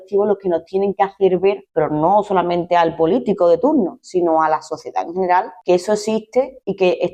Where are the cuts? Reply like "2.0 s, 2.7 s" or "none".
none